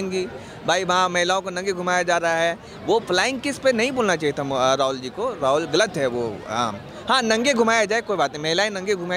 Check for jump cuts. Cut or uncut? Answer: uncut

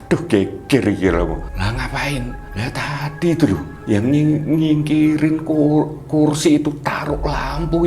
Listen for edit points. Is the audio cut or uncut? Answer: cut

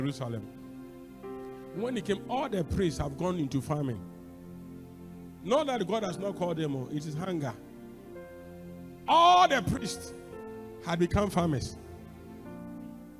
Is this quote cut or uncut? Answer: uncut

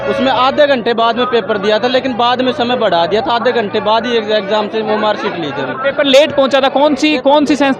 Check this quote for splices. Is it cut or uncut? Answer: uncut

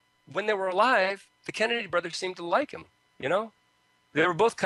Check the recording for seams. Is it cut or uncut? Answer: uncut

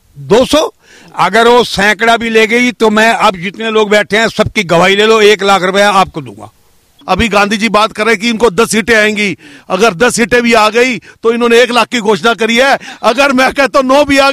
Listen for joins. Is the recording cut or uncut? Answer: cut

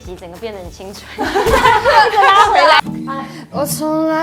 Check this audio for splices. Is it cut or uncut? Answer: cut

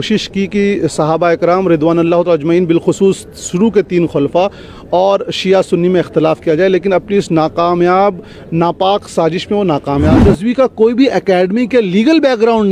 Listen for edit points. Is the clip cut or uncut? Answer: cut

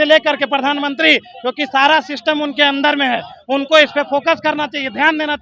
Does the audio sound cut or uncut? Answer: uncut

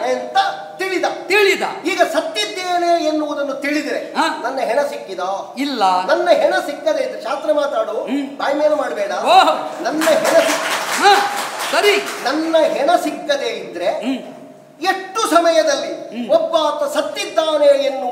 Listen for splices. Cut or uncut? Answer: uncut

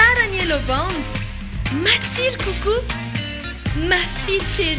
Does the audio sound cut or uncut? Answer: uncut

